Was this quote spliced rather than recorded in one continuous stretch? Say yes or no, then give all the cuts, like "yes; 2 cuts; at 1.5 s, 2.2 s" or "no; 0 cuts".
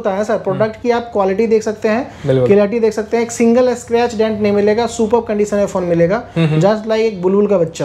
no; 0 cuts